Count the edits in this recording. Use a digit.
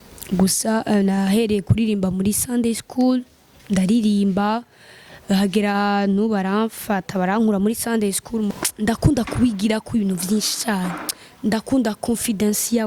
1